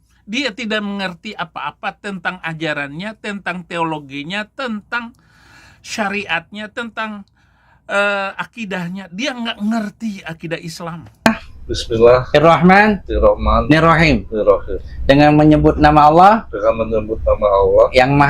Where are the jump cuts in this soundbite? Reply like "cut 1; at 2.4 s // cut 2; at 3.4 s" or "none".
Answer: cut 1; at 11.3 s